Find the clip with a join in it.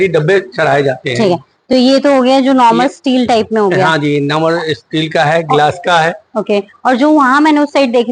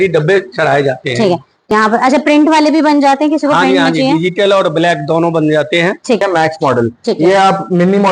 second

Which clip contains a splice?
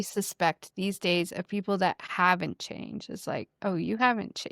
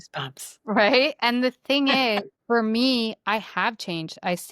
second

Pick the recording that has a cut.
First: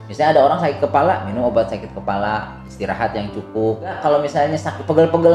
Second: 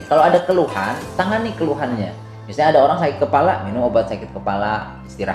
first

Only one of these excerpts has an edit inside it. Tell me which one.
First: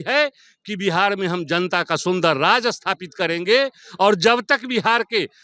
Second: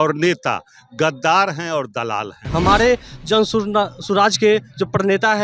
second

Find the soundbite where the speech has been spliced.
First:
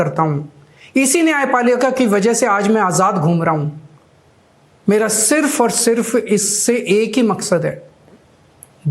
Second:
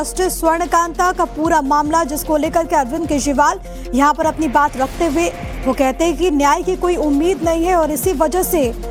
first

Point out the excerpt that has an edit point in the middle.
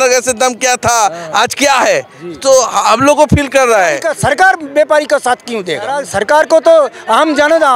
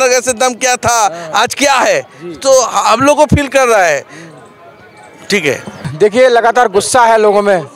first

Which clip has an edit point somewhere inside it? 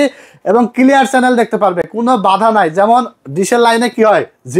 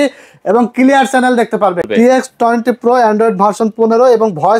second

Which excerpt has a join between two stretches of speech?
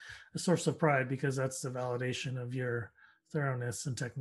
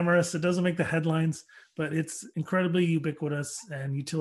second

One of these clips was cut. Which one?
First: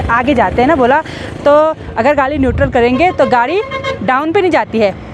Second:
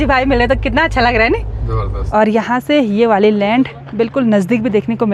second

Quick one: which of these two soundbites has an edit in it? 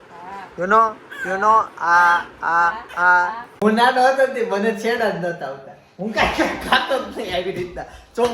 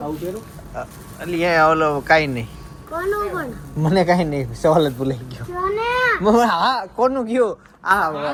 first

